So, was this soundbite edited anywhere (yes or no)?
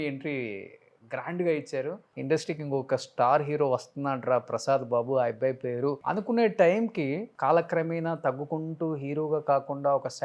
yes